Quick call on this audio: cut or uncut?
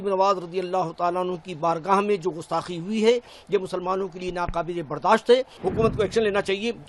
cut